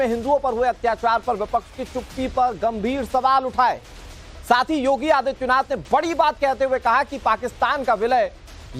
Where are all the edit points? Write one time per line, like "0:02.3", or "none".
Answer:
none